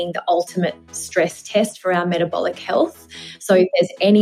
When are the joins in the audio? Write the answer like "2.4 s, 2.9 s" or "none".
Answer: none